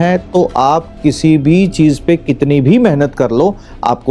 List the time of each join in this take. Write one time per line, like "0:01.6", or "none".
none

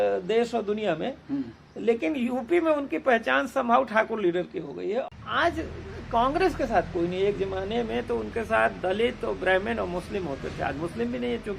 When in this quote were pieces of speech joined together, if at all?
0:05.1

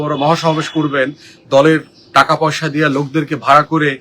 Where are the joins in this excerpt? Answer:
none

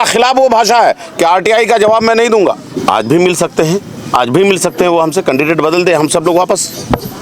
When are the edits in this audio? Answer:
0:02.8

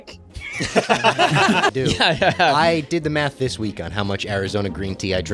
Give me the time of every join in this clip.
0:01.7

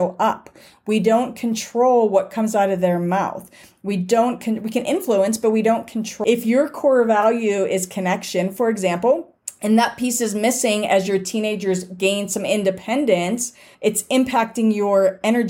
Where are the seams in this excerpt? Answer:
0:06.1

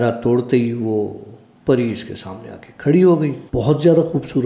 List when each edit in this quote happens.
0:03.4

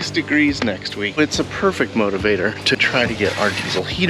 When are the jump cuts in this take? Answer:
0:01.2
0:02.8

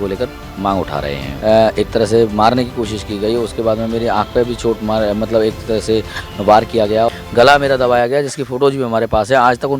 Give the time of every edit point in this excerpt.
0:01.3
0:07.1

